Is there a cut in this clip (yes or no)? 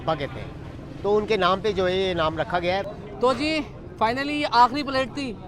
yes